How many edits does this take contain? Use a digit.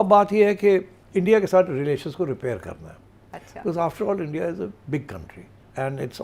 0